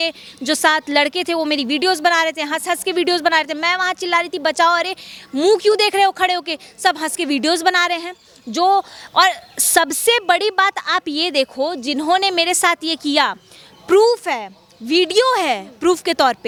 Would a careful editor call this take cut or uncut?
uncut